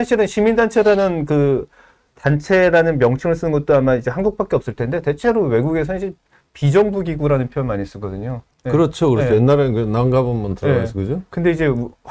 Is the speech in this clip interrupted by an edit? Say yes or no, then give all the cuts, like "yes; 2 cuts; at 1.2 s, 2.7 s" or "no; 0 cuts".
no; 0 cuts